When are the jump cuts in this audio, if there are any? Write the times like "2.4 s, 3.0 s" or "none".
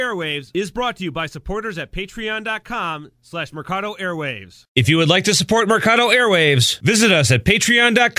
4.6 s